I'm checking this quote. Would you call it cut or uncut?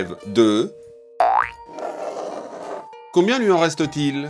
uncut